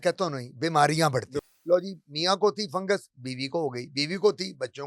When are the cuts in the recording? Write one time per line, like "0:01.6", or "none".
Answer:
0:01.5